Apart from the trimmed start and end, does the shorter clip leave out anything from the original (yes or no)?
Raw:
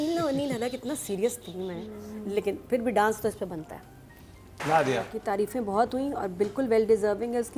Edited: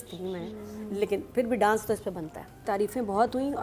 yes